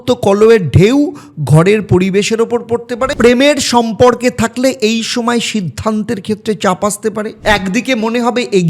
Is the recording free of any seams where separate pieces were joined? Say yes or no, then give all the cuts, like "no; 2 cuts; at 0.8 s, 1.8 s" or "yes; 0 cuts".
no; 2 cuts; at 3.1 s, 7.3 s